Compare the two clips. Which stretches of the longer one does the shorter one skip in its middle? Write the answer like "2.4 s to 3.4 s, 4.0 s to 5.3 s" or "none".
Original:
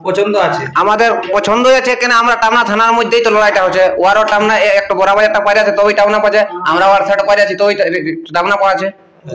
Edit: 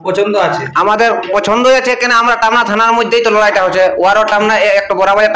none